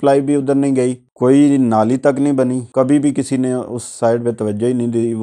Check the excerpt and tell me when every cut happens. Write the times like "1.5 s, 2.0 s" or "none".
1.0 s, 2.6 s

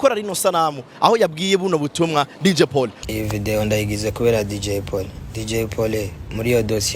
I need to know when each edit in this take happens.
3.0 s

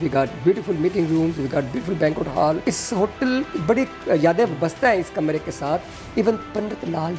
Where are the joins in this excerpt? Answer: 2.7 s

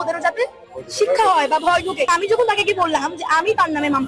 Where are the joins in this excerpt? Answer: 2.1 s

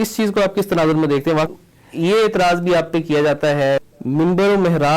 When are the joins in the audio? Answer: 1.5 s, 3.8 s

